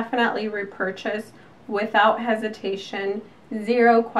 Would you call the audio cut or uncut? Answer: uncut